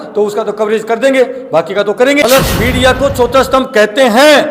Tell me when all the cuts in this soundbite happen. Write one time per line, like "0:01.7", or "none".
0:02.1